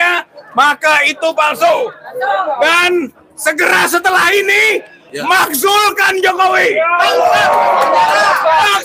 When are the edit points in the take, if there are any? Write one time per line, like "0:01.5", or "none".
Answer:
none